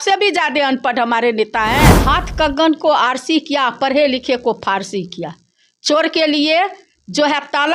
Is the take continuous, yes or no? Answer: no